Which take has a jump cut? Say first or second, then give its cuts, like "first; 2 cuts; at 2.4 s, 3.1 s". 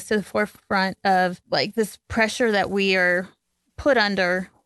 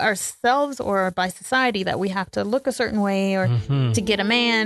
first; 1 cut; at 1.4 s